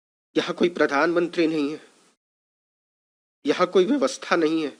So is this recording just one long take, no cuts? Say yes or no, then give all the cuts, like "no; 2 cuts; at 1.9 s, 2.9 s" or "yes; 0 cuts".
yes; 0 cuts